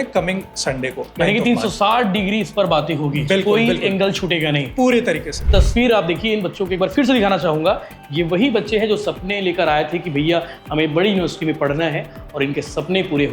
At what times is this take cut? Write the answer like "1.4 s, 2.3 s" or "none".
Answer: 5.5 s